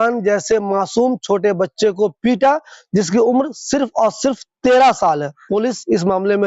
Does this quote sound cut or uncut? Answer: cut